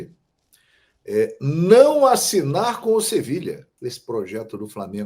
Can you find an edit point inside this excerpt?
yes; 1 cut; at 3.7 s

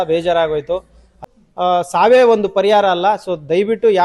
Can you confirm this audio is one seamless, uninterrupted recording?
no; 1 cut; at 1.2 s

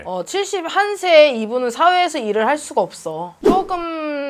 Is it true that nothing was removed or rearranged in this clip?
no; 1 cut; at 3.3 s

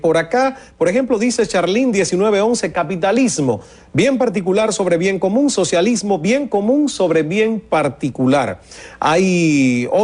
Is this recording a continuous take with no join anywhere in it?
no; 1 cut; at 3.6 s

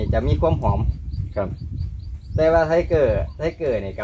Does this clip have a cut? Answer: no; 0 cuts

